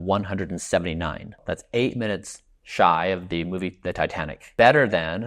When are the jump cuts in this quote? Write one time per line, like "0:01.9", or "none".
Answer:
0:01.4
0:04.5